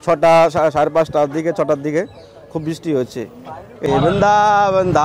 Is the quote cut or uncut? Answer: cut